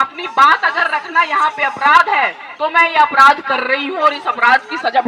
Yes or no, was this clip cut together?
no